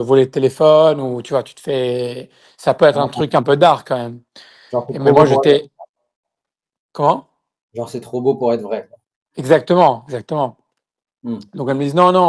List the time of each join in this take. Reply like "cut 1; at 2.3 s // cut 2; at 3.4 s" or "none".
none